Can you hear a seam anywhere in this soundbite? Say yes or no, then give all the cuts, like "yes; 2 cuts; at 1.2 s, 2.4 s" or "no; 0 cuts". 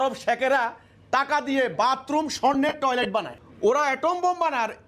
yes; 1 cut; at 3.4 s